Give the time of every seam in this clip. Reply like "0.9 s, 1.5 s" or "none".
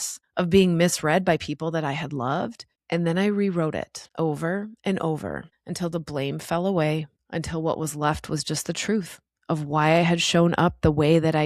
none